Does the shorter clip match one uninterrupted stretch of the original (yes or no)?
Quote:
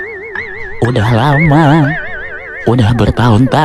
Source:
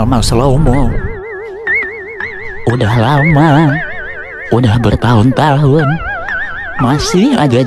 yes